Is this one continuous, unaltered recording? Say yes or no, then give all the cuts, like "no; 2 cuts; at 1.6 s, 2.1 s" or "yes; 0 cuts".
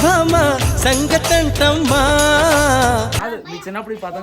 no; 1 cut; at 3.2 s